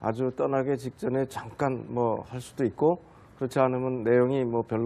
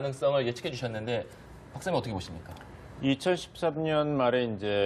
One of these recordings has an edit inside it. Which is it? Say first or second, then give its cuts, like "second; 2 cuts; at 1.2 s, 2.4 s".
first; 1 cut; at 3.2 s